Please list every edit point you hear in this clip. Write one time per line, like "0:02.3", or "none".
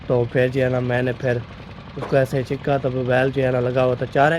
none